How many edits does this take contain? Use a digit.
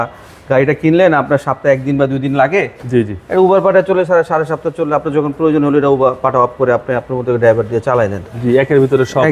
0